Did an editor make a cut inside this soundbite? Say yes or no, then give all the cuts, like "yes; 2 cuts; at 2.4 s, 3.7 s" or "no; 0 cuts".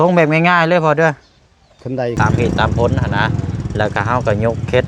yes; 1 cut; at 2.2 s